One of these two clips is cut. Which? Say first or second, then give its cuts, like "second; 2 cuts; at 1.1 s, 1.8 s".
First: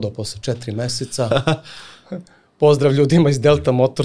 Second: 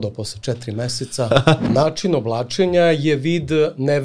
second; 1 cut; at 1.6 s